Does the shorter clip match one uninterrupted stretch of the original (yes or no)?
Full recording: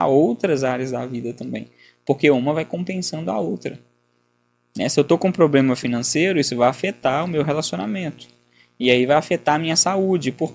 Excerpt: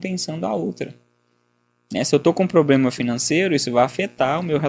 yes